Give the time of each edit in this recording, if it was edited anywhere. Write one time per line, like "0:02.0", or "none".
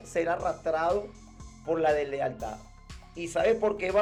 none